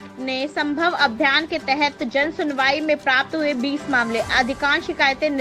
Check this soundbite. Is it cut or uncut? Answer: uncut